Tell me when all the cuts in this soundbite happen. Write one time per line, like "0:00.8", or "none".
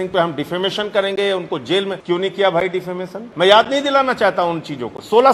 0:02.0
0:03.2